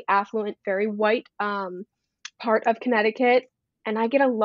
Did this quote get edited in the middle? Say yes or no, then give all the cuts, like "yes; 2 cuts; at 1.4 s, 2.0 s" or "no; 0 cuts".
no; 0 cuts